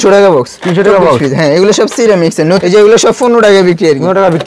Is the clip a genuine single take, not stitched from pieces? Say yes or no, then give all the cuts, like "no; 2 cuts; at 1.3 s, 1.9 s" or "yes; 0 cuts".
no; 1 cut; at 2.6 s